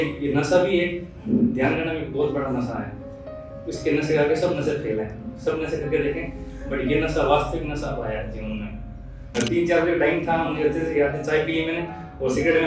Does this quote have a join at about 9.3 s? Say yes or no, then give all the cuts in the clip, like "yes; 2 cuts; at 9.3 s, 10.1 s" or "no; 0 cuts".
yes; 1 cut; at 9.3 s